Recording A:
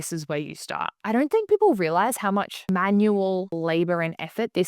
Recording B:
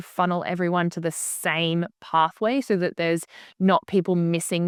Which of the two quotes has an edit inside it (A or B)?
A